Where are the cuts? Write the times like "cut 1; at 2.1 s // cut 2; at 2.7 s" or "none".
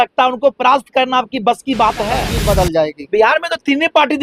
cut 1; at 2.3 s